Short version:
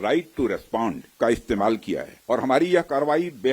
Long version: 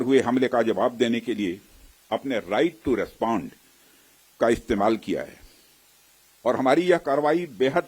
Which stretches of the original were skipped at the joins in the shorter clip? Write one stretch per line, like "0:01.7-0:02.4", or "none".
0:03.5-0:04.3
0:05.3-0:06.3